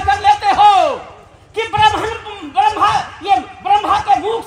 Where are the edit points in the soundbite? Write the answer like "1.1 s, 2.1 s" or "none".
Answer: none